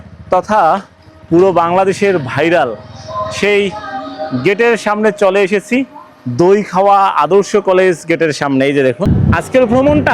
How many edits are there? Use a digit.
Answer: 1